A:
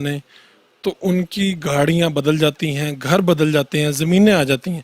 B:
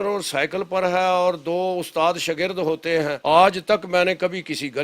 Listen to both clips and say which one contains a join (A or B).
B